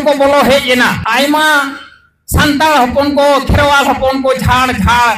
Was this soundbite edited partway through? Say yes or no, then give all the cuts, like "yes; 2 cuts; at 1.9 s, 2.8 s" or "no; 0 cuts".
yes; 1 cut; at 1.0 s